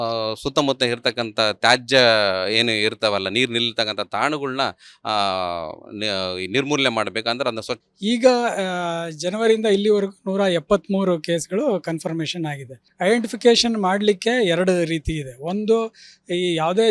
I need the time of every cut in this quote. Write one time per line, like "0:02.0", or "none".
0:08.3